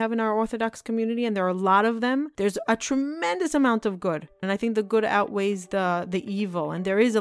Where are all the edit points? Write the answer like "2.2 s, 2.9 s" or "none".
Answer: 2.3 s, 4.4 s